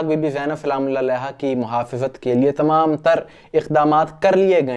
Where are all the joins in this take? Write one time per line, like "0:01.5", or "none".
none

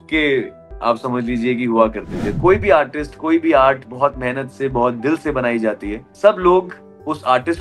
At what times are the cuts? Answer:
0:02.3
0:06.1

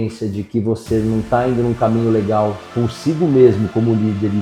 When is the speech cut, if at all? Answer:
none

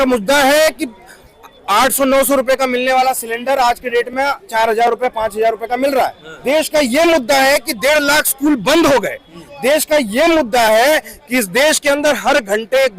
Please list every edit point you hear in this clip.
0:06.3

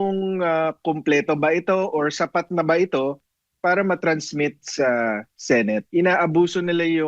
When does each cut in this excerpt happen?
0:05.9

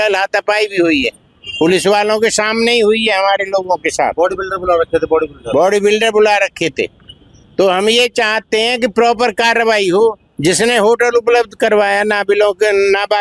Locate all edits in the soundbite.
none

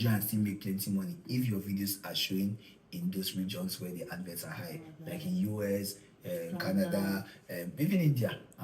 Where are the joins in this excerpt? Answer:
none

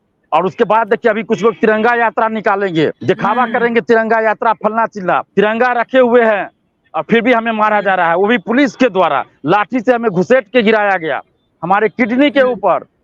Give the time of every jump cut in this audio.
0:03.0
0:05.3
0:09.3

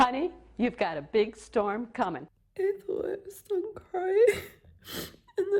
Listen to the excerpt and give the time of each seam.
0:02.4

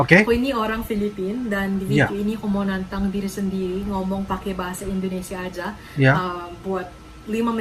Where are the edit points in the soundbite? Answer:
none

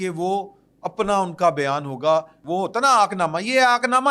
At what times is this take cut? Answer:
0:02.4

